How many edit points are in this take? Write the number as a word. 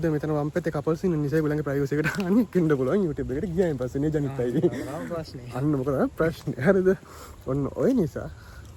zero